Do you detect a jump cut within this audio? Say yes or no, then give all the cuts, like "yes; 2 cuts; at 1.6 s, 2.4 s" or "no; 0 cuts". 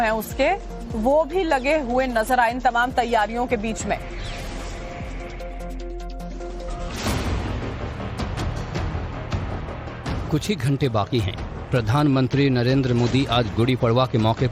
yes; 1 cut; at 1.9 s